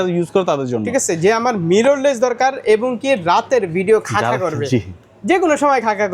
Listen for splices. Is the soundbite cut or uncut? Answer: uncut